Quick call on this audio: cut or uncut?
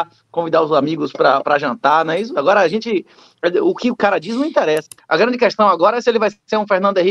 cut